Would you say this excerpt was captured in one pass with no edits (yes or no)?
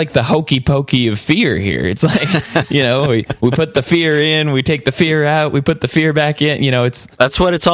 yes